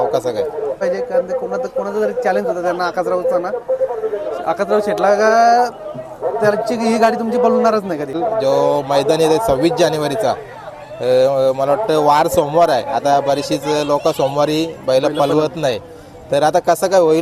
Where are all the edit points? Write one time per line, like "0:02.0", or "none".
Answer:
0:00.8
0:08.2

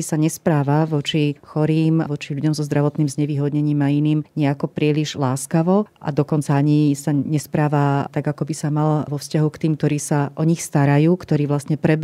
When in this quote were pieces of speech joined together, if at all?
none

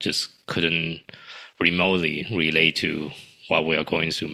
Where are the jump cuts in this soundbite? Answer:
none

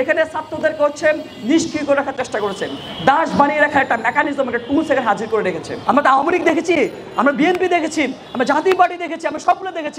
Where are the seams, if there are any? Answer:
0:05.7

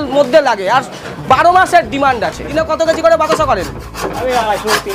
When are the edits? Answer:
0:02.6

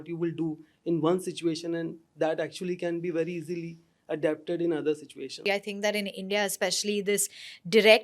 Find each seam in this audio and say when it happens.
0:05.5

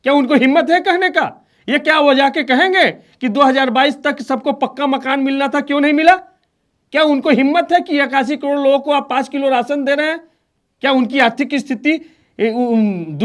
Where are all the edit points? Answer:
none

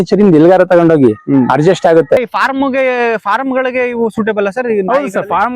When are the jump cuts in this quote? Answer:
0:02.3

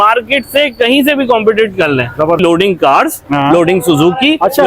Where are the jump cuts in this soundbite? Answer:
0:02.4

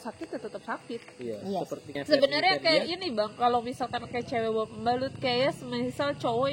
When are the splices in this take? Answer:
0:01.9

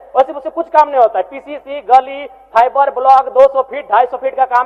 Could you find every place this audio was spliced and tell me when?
none

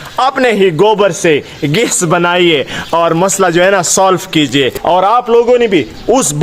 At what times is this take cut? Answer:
0:04.8

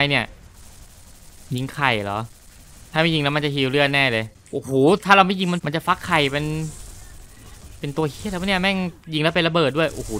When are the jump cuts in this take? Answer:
0:04.4
0:05.6

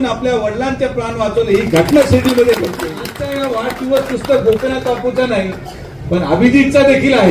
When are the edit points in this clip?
0:03.2

